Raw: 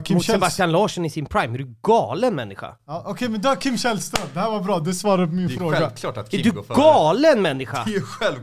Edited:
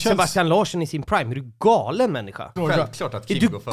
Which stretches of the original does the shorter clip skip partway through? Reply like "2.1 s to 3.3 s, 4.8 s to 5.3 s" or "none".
2.8 s to 5.6 s